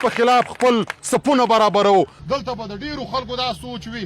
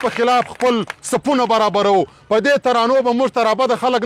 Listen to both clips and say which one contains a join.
first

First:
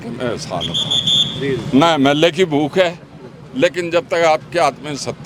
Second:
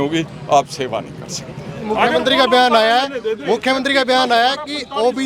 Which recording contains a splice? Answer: second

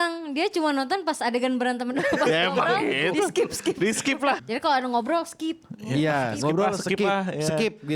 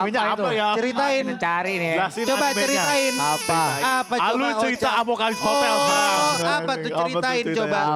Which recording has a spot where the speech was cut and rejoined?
first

